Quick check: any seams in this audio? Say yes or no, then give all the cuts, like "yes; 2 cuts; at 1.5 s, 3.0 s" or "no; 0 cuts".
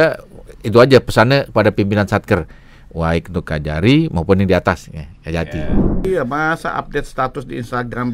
yes; 1 cut; at 6.0 s